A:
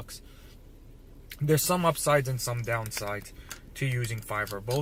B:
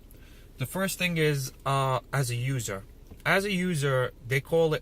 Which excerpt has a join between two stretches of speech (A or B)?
B